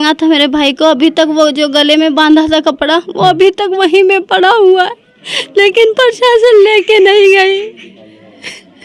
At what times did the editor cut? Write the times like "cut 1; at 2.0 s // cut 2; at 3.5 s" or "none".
none